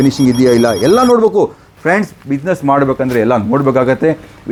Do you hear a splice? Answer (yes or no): no